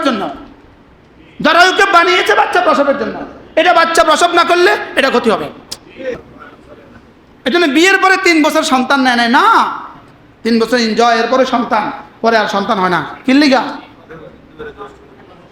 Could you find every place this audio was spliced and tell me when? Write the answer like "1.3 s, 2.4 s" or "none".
6.2 s